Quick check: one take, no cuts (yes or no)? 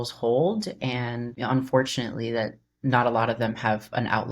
no